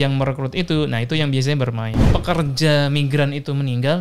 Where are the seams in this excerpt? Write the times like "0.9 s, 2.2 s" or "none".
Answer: 2.1 s